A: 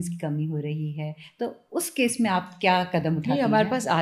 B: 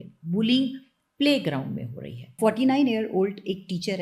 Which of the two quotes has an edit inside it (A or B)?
B